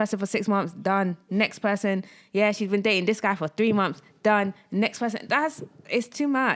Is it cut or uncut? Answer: uncut